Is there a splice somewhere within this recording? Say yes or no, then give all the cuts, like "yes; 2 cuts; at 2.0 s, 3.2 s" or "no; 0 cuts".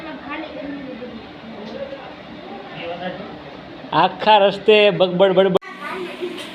yes; 1 cut; at 5.6 s